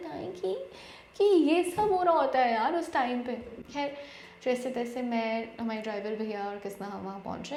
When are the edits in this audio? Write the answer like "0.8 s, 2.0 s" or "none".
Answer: none